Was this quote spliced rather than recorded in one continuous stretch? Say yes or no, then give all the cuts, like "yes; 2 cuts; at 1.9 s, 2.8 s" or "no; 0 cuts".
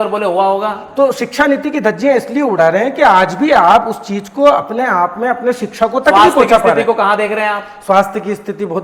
no; 0 cuts